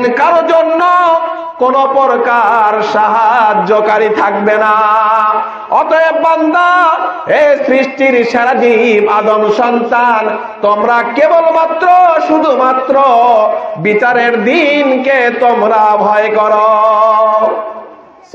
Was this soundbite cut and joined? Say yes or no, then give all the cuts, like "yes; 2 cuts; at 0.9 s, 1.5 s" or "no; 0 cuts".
no; 0 cuts